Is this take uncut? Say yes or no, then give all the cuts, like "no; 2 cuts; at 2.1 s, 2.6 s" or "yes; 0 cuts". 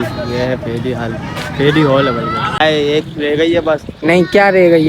no; 1 cut; at 2.6 s